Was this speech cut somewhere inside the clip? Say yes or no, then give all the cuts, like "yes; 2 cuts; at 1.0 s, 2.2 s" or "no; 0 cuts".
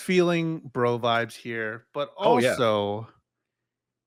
no; 0 cuts